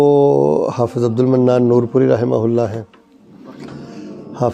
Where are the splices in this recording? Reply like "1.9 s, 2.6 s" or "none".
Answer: none